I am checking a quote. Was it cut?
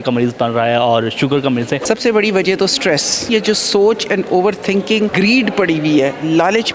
yes; 3 cuts; at 1.8 s, 3.3 s, 5.1 s

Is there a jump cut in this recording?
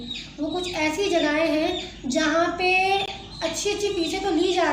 no; 0 cuts

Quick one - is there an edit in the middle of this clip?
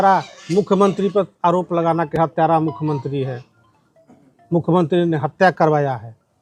no; 0 cuts

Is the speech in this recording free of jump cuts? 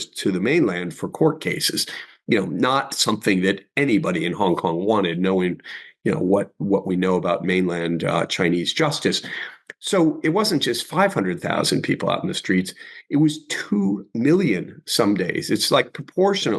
yes; 0 cuts

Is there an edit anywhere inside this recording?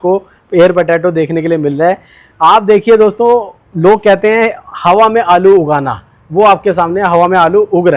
no; 0 cuts

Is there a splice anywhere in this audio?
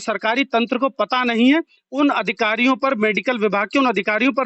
no; 0 cuts

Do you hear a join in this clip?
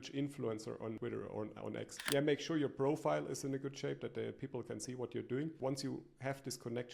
yes; 3 cuts; at 1.0 s, 2.0 s, 5.6 s

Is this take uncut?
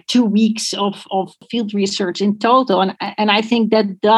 no; 1 cut; at 1.4 s

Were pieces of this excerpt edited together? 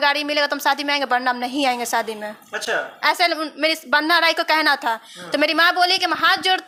no; 0 cuts

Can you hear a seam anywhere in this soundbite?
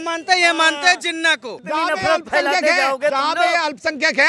yes; 1 cut; at 1.5 s

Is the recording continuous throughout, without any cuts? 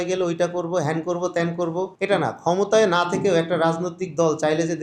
no; 1 cut; at 1.9 s

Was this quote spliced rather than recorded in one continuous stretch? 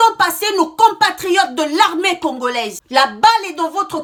no; 0 cuts

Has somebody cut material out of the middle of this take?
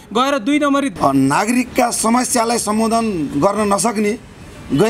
yes; 1 cut; at 0.9 s

